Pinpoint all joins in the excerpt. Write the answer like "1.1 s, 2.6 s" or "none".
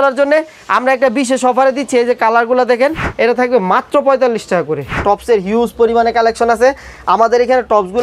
3.0 s, 5.0 s

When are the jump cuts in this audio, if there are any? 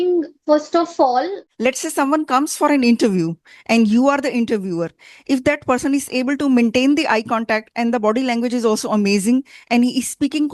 1.4 s

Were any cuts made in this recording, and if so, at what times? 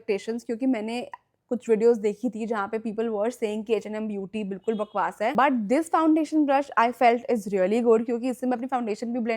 none

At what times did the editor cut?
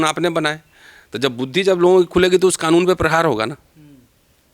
none

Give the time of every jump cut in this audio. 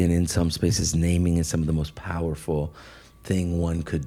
none

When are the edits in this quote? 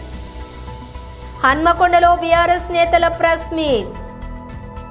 none

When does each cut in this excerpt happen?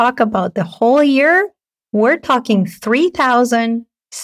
none

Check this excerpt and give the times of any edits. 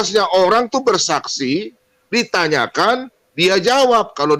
none

